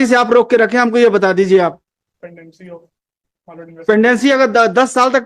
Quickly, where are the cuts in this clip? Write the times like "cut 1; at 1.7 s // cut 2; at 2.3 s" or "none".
cut 1; at 2.2 s